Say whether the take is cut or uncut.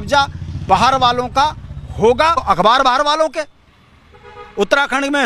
cut